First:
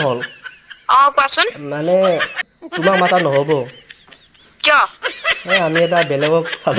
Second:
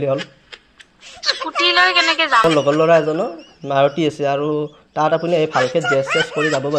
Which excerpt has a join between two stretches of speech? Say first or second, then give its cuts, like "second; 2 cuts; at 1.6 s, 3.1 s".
second; 1 cut; at 2.4 s